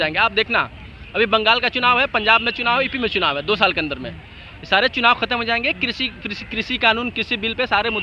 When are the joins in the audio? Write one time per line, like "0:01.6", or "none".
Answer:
none